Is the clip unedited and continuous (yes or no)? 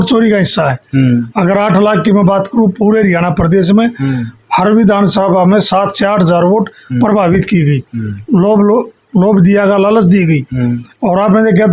yes